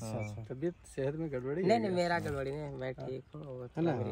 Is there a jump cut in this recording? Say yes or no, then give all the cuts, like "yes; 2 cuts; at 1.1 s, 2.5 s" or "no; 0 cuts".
no; 0 cuts